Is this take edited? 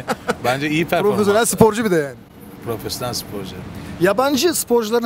no; 0 cuts

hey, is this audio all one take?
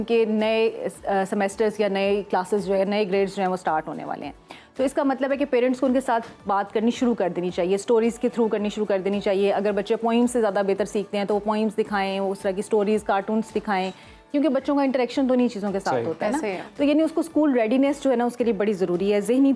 yes; 0 cuts

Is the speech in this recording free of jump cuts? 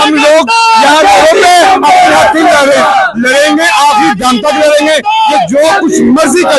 yes; 0 cuts

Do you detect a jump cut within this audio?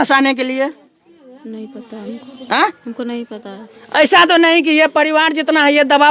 no; 0 cuts

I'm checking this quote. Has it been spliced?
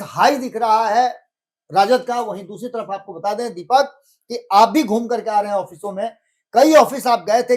no; 0 cuts

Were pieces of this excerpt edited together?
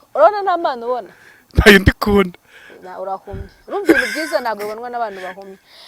no; 0 cuts

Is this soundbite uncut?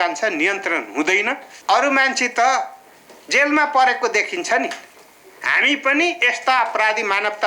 no; 1 cut; at 1.5 s

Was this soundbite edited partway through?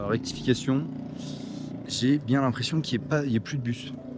no; 0 cuts

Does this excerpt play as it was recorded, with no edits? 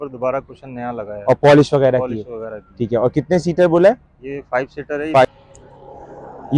no; 1 cut; at 5.2 s

